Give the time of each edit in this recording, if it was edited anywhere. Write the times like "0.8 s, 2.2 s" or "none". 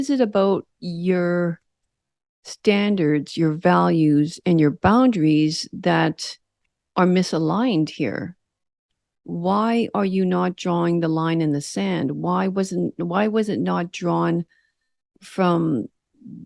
none